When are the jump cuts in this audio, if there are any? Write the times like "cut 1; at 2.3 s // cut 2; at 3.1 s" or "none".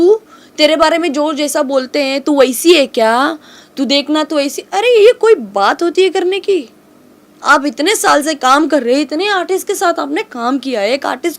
none